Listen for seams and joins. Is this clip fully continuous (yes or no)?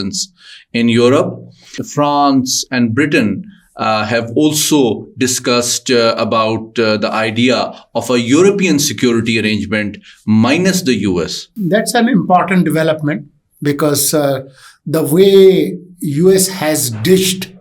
no